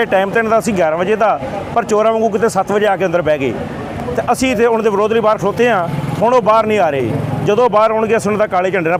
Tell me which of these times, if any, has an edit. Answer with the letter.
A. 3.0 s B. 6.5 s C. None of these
C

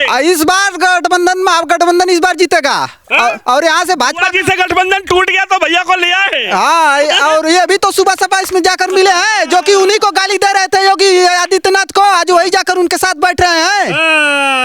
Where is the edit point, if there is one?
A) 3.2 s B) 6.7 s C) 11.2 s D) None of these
D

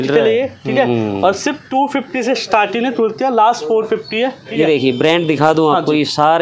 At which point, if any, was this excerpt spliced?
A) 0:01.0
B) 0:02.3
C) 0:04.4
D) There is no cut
C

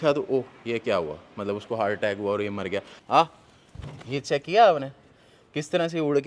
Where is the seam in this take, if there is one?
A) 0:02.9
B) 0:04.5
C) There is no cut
A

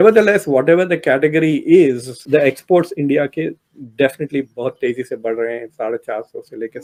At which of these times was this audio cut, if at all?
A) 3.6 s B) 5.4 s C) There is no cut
C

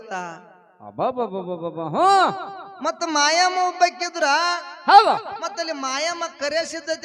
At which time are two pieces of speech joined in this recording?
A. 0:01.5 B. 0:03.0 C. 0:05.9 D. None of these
D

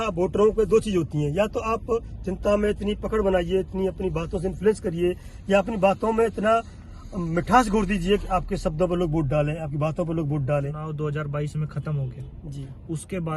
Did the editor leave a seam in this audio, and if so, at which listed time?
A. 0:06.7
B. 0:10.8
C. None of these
B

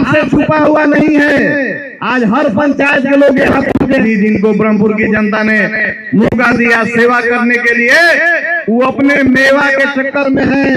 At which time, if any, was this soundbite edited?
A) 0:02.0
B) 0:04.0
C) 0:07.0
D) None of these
B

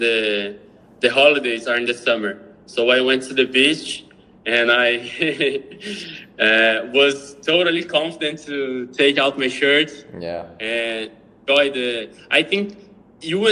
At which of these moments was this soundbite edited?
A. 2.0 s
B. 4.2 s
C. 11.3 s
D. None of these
D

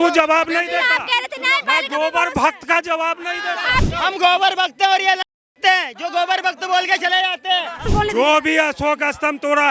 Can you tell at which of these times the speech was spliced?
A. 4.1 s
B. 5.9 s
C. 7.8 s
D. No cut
C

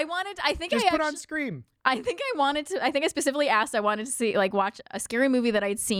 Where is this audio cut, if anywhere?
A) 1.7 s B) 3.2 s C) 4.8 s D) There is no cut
D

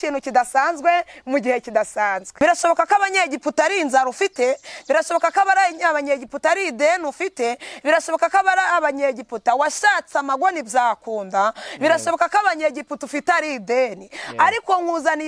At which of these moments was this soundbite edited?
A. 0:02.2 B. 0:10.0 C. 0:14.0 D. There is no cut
A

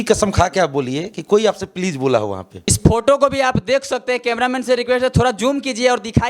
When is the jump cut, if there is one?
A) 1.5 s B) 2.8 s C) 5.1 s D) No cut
B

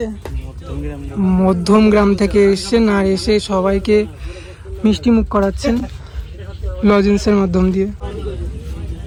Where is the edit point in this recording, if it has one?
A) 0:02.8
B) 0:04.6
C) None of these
C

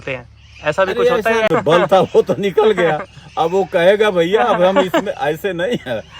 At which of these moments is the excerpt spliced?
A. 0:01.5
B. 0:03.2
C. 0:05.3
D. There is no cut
A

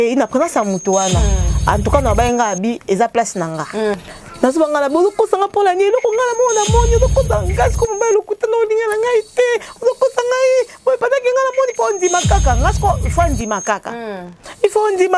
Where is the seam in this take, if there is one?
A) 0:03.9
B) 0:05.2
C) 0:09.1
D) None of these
A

